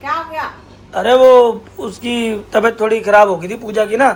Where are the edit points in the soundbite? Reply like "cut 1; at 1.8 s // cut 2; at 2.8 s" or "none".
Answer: none